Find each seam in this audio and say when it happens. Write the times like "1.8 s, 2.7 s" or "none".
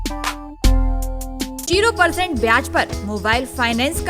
1.7 s